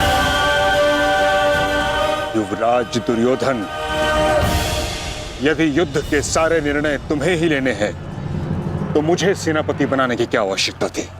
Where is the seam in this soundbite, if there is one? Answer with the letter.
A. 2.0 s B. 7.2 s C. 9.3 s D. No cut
A